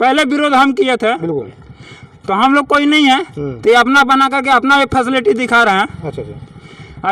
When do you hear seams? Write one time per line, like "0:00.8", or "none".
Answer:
none